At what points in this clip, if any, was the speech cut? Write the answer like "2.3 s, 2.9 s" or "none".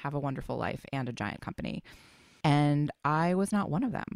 2.3 s